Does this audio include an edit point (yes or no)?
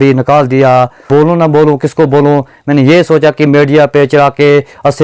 yes